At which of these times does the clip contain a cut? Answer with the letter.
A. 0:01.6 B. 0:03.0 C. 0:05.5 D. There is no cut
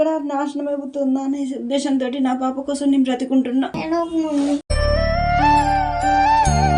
D